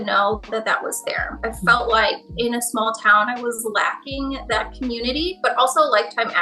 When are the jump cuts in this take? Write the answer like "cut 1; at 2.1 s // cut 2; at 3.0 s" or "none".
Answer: cut 1; at 1.4 s // cut 2; at 5.4 s